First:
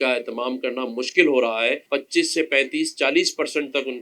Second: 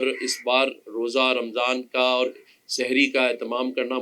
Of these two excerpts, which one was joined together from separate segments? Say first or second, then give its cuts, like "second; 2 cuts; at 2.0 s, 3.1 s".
first; 1 cut; at 1.8 s